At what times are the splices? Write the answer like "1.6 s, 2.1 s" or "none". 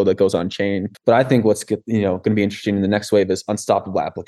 none

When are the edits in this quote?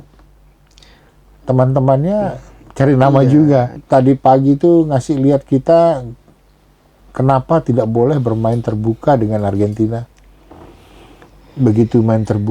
3.8 s

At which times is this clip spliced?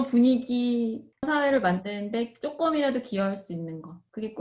1.3 s

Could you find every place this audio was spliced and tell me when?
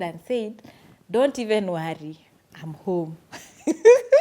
none

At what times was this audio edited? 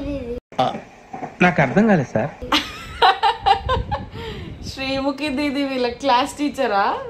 none

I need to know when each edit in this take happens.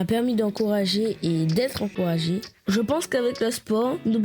2.8 s

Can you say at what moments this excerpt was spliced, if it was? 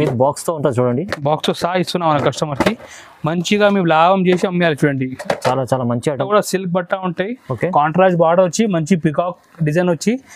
6.1 s

